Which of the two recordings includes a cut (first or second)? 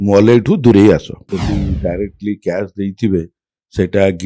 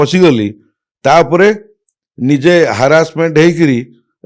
first